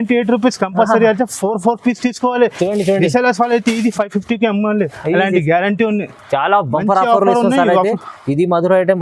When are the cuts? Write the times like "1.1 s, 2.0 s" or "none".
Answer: none